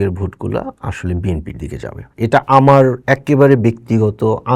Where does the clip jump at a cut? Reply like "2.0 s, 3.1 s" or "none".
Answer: none